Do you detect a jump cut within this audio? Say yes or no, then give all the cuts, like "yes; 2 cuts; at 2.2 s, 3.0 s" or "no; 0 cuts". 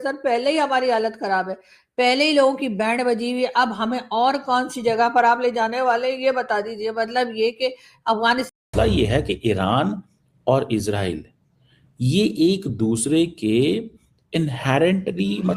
yes; 1 cut; at 8.5 s